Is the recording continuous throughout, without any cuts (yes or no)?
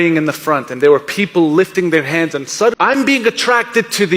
no